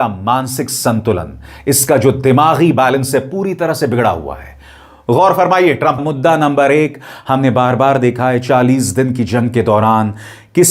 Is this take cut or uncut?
cut